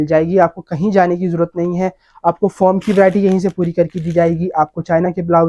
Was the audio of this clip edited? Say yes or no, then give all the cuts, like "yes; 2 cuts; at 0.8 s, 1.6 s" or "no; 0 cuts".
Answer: no; 0 cuts